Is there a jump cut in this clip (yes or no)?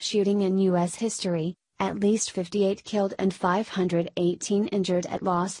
yes